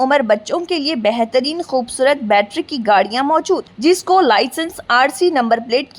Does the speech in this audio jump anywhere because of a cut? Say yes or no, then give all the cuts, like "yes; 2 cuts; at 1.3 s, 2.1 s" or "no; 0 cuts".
no; 0 cuts